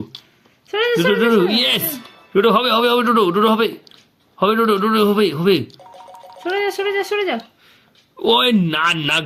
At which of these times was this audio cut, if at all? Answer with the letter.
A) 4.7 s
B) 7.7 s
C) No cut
C